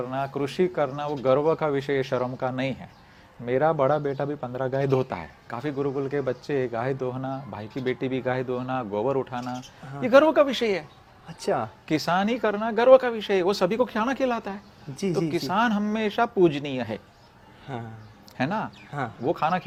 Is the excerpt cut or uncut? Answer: uncut